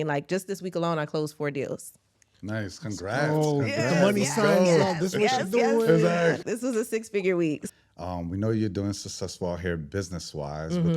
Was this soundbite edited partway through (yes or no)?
yes